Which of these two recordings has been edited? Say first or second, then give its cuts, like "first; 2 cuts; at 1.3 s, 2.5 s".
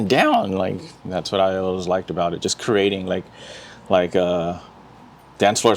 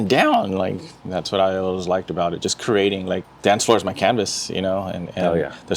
second; 1 cut; at 3.3 s